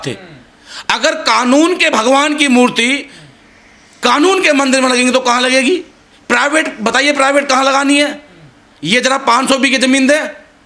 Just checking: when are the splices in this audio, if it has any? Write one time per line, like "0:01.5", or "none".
none

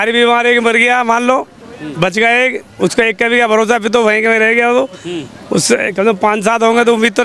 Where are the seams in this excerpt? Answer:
none

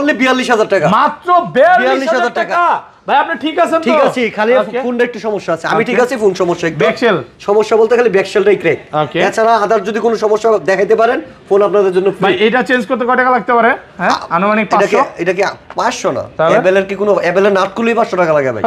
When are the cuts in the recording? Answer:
none

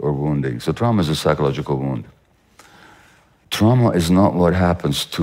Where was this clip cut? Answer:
0:03.4

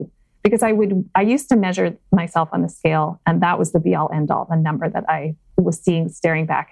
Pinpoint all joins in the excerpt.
0:05.4

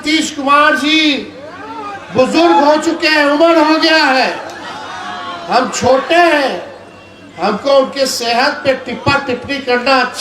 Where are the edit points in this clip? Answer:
none

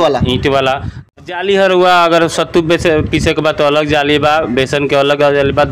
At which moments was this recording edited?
0:01.1

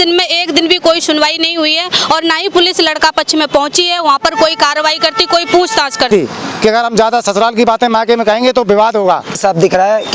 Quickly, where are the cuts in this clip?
0:06.1
0:09.4

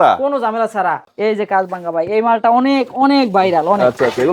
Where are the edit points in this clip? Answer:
0:01.0

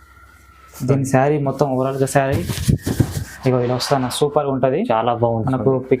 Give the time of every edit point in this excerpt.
none

